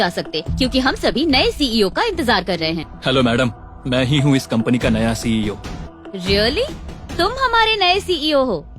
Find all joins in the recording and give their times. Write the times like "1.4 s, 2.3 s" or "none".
2.9 s, 5.8 s